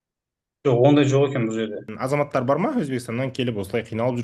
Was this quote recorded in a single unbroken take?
no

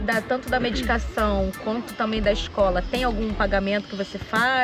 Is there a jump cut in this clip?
no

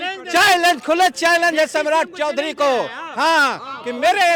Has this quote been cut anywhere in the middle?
no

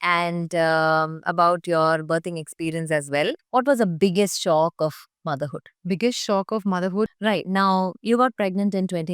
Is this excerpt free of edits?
no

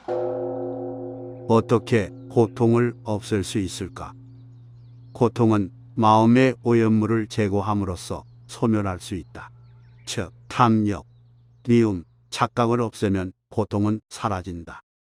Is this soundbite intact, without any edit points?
yes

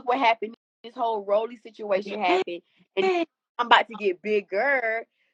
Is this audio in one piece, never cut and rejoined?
yes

